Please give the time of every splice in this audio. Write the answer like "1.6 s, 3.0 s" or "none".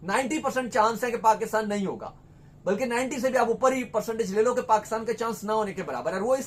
none